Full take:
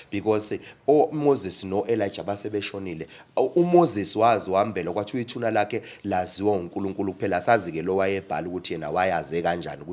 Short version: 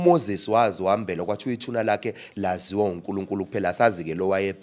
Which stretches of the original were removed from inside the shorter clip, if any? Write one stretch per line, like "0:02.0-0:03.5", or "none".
none